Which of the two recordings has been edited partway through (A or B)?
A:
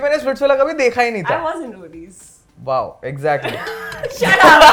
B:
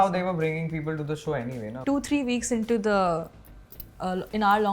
B